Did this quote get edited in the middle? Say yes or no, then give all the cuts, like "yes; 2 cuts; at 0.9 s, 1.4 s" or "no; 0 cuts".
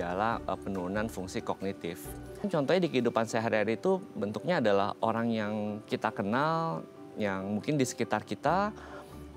yes; 1 cut; at 2.4 s